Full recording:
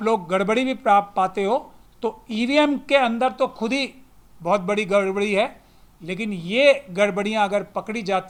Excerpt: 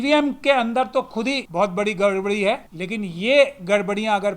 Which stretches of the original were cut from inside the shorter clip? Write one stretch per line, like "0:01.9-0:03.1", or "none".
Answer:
0:03.9-0:04.4
0:05.7-0:06.0